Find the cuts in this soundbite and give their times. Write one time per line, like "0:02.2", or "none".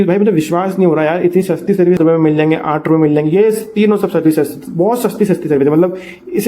0:02.0